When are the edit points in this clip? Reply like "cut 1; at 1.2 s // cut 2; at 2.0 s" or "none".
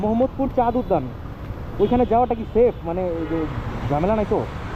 none